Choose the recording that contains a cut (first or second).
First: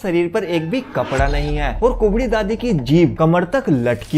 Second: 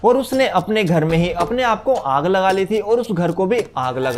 first